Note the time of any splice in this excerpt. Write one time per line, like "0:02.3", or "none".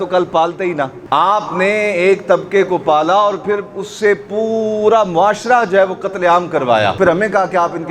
0:07.0